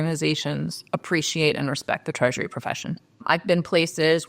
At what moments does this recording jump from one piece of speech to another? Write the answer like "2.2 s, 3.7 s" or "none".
3.1 s